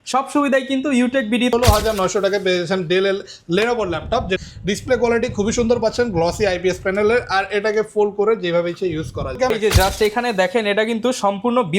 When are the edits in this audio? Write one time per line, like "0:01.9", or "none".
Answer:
0:01.5
0:04.4
0:09.5